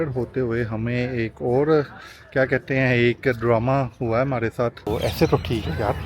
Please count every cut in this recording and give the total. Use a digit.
1